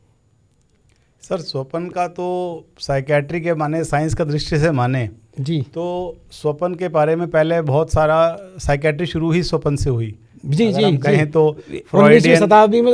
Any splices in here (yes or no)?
no